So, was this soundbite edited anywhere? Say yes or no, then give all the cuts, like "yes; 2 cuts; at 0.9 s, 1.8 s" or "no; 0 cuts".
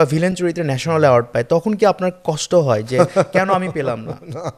no; 0 cuts